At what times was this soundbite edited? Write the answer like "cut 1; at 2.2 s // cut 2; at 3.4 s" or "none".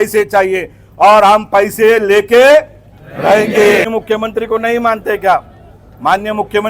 cut 1; at 3.9 s